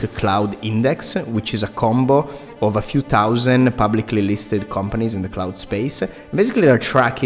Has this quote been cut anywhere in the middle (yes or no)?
no